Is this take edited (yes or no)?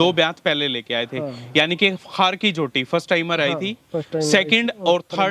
no